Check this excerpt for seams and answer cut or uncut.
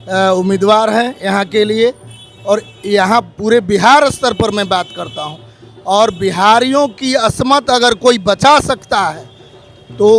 uncut